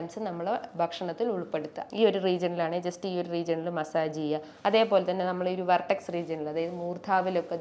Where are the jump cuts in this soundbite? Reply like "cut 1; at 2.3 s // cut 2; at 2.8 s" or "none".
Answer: cut 1; at 1.8 s

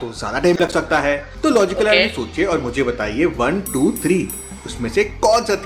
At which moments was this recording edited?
none

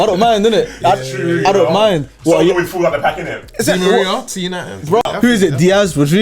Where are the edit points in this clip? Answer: cut 1; at 5.0 s

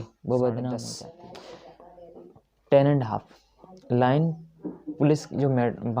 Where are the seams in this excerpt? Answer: cut 1; at 1.0 s

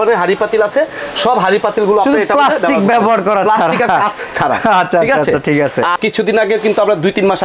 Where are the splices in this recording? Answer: cut 1; at 6.0 s

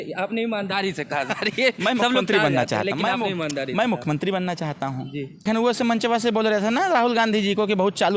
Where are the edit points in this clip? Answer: cut 1; at 5.4 s

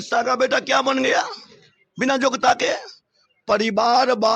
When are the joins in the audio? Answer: none

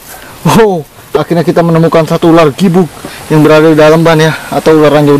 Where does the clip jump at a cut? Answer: none

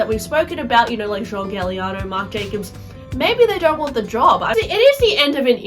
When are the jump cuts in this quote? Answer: cut 1; at 4.5 s

